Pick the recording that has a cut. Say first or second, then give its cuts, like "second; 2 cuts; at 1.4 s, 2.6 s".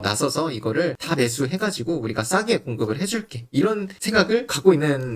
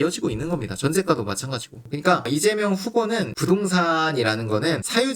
second; 1 cut; at 1.7 s